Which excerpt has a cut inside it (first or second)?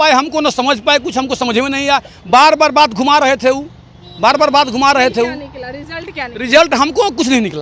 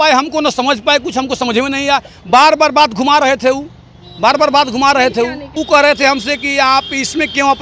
second